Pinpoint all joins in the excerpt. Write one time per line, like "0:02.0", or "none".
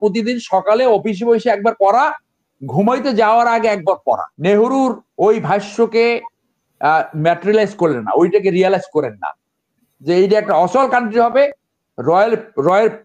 0:04.3

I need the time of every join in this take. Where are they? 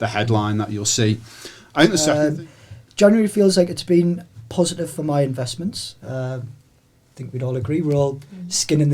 0:02.1

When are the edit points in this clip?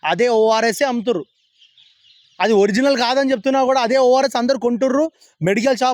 none

